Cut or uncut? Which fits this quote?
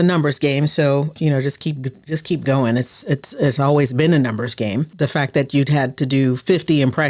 cut